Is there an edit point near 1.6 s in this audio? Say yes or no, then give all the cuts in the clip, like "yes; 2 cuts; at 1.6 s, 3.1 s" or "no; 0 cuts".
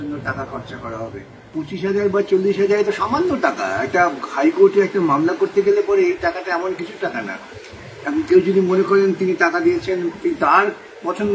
yes; 1 cut; at 1.6 s